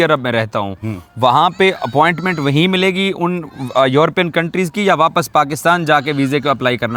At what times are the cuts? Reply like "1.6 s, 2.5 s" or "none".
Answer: none